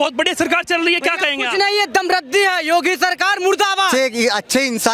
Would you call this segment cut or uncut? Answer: cut